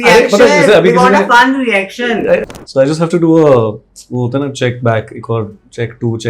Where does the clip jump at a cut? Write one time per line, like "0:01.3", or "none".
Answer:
0:02.5